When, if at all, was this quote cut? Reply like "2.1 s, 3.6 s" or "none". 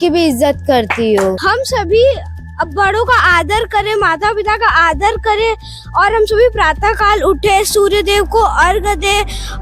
1.3 s